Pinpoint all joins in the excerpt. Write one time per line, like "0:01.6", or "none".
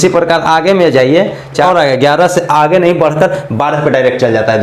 0:01.6